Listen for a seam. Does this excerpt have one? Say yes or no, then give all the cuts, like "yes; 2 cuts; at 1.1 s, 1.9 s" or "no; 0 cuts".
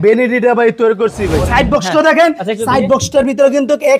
yes; 1 cut; at 1.4 s